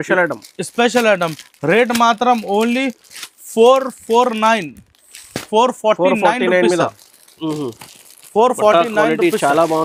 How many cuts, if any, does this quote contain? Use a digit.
0